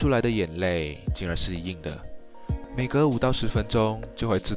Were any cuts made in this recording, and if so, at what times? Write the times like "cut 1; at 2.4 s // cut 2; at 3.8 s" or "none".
none